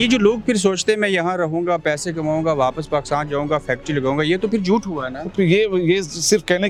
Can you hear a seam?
no; 0 cuts

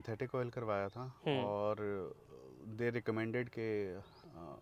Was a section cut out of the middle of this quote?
no; 0 cuts

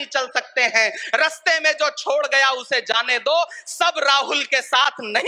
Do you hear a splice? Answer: no; 0 cuts

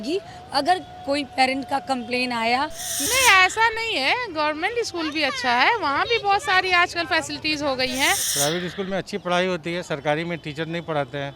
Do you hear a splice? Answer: yes; 2 cuts; at 2.9 s, 8.3 s

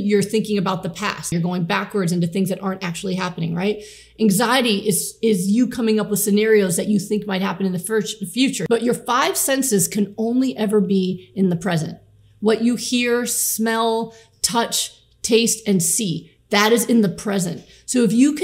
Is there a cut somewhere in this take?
yes; 1 cut; at 1.3 s

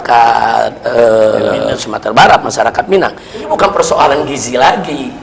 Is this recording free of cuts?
no; 1 cut; at 3.5 s

